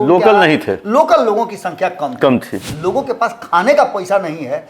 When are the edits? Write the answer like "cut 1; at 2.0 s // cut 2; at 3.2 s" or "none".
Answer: cut 1; at 2.6 s